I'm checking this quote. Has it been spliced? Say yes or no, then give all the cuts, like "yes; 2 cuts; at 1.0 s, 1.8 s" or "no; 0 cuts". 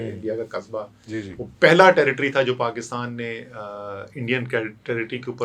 no; 0 cuts